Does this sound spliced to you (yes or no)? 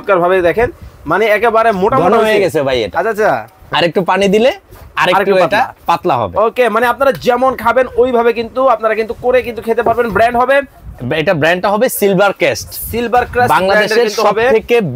no